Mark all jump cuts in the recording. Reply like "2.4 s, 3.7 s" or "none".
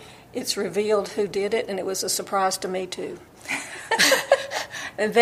none